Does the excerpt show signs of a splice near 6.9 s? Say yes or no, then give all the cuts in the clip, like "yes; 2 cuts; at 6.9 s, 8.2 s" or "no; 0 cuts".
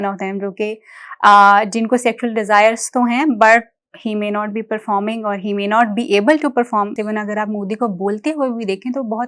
yes; 1 cut; at 6.9 s